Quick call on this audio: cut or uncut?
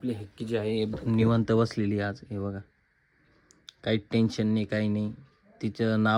uncut